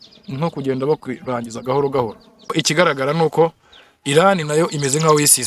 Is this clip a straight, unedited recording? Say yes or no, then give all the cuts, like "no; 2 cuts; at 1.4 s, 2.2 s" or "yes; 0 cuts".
no; 1 cut; at 2.5 s